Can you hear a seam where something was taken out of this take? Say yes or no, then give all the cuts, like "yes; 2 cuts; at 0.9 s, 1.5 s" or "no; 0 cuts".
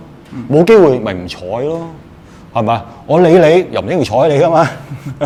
no; 0 cuts